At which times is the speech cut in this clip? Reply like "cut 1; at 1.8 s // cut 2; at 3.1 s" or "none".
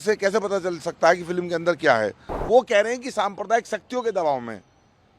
cut 1; at 2.4 s